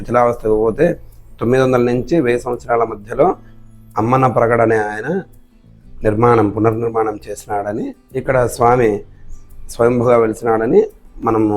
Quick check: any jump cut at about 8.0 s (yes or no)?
yes